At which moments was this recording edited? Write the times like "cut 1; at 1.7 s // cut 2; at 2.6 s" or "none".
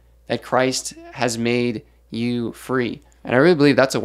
cut 1; at 3.1 s